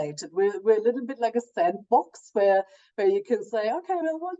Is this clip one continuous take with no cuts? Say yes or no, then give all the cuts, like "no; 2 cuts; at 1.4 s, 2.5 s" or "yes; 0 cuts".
yes; 0 cuts